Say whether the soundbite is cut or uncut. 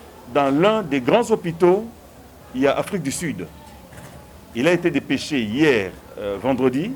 uncut